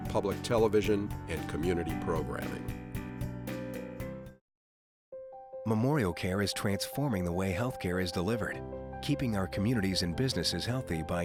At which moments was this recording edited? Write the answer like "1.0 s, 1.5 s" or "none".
none